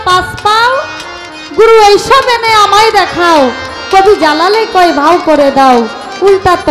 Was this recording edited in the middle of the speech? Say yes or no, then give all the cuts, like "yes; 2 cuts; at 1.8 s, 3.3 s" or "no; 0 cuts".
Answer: no; 0 cuts